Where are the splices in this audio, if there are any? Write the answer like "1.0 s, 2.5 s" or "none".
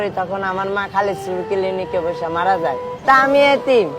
2.9 s